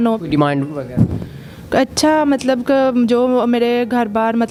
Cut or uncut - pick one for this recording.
uncut